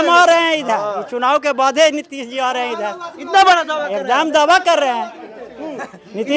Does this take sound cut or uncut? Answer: uncut